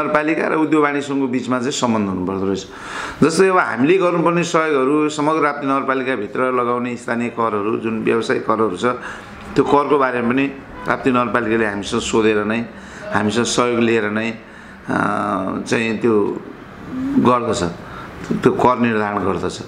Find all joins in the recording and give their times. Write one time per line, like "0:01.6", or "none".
none